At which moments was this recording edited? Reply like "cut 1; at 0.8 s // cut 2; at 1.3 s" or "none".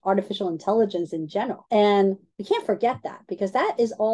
cut 1; at 1.6 s // cut 2; at 2.3 s